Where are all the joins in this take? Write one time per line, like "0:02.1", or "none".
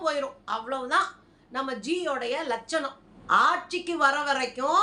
0:03.1